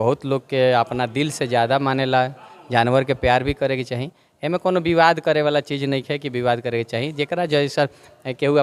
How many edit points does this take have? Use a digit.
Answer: 0